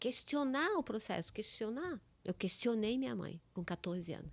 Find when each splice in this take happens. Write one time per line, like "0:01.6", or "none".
0:02.1
0:03.4